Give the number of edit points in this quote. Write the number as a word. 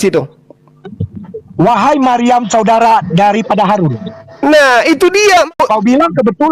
one